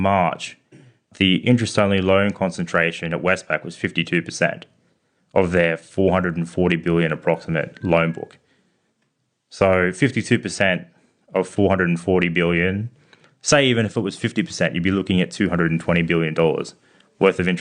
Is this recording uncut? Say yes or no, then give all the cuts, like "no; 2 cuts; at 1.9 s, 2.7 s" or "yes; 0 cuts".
no; 1 cut; at 1.1 s